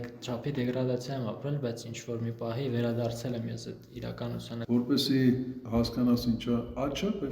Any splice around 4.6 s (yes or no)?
yes